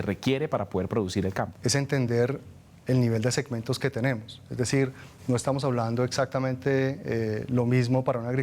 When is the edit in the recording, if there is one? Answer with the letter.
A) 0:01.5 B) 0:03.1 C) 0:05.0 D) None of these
A